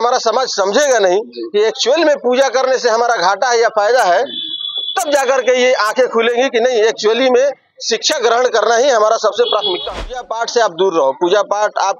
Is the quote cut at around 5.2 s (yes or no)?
no